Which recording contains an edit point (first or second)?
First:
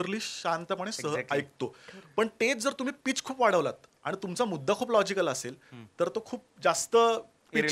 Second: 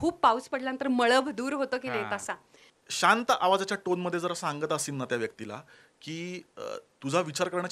second